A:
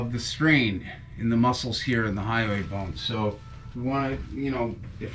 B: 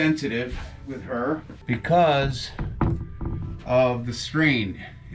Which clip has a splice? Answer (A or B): B